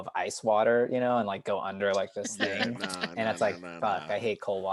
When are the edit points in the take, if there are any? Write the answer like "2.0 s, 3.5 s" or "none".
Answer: none